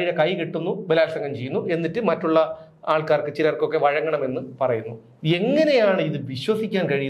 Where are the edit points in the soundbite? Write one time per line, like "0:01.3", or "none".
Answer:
none